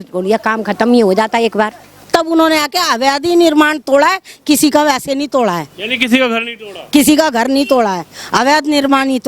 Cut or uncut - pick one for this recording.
cut